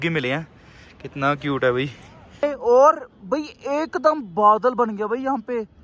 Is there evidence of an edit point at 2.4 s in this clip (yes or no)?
yes